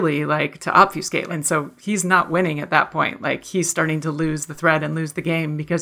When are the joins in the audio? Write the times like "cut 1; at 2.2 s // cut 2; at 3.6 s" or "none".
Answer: cut 1; at 1.3 s